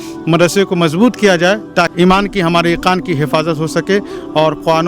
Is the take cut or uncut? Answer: cut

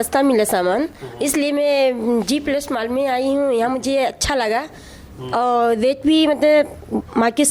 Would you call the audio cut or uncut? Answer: uncut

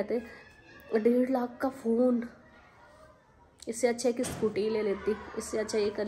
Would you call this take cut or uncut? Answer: uncut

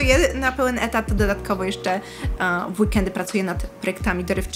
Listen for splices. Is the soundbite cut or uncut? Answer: uncut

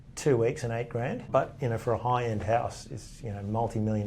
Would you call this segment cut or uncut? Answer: cut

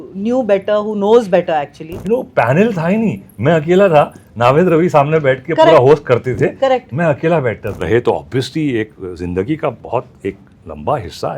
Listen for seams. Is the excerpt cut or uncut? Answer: cut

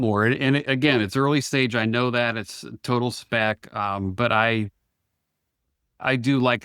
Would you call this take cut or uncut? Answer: cut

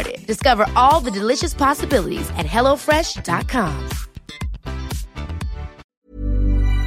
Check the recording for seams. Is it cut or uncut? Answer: cut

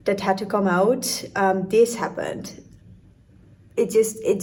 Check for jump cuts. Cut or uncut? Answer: uncut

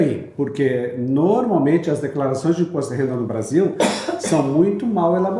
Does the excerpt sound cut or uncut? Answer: uncut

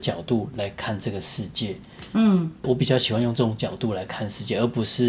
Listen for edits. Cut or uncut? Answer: uncut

